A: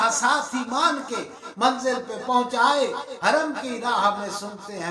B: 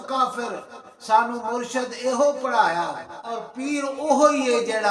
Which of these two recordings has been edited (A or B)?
B